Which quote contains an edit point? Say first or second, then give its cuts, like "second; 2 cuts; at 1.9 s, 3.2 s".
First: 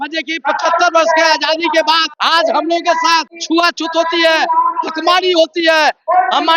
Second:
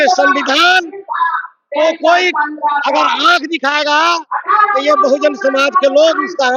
first; 2 cuts; at 2.1 s, 3.3 s